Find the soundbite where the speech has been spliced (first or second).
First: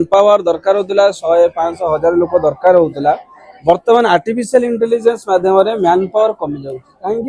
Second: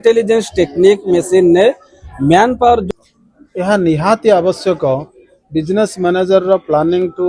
second